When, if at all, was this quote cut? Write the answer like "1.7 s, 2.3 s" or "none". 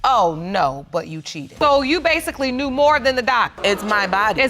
1.5 s